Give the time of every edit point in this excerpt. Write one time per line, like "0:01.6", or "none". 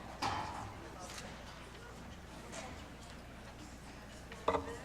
0:03.0